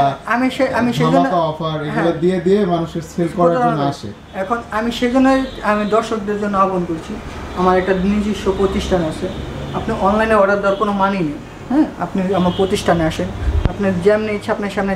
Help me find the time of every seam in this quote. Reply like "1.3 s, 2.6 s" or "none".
none